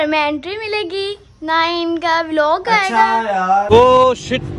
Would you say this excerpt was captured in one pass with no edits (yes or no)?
no